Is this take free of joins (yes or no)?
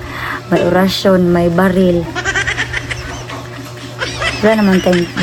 yes